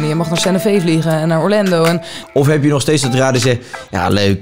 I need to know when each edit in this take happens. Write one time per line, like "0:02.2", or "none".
0:02.1